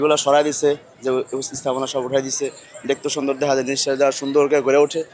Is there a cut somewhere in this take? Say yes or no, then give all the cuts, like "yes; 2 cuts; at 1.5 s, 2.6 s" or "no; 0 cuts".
no; 0 cuts